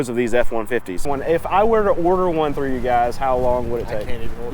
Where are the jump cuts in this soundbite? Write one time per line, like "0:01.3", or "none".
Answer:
0:01.1